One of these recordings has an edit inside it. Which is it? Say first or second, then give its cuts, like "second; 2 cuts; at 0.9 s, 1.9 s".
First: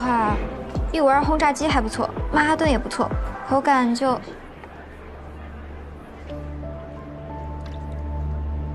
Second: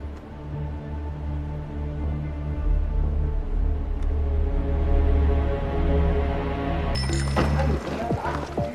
second; 1 cut; at 6.9 s